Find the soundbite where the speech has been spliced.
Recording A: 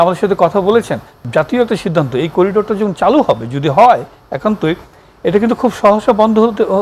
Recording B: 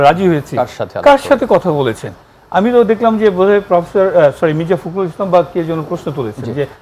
A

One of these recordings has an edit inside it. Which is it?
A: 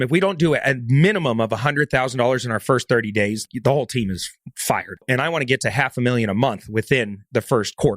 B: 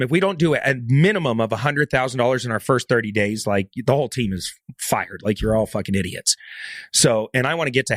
A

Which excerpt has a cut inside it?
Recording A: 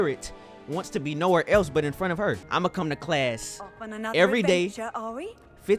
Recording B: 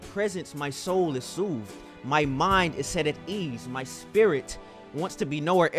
A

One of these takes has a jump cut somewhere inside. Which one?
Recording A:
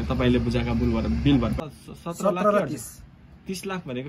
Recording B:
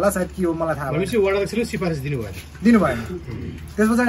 A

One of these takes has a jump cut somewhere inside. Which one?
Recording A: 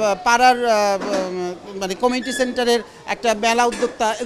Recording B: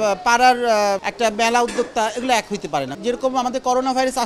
B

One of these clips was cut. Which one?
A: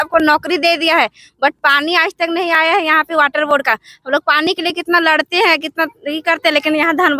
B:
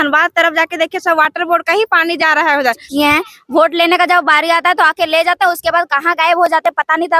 B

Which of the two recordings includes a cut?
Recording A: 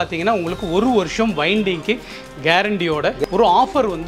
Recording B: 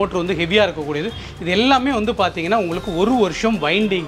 A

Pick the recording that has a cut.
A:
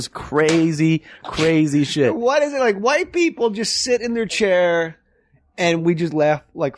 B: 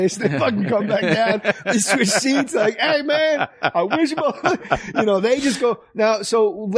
A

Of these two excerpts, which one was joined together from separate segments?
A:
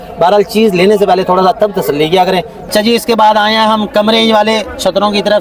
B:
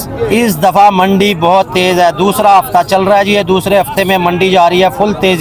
A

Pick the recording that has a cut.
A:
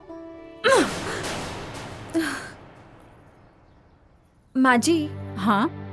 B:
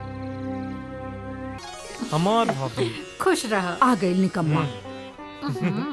B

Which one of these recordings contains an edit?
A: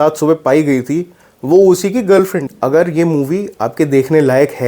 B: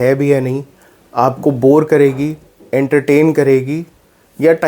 A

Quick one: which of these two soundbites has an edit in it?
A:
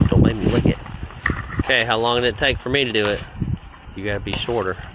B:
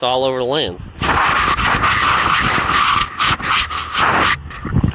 A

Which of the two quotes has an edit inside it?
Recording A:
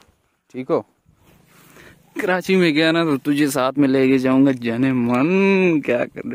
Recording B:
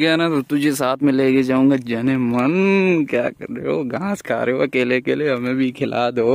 A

